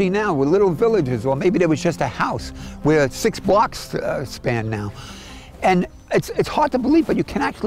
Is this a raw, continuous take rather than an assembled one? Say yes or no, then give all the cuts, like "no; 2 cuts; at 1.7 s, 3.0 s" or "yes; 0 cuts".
yes; 0 cuts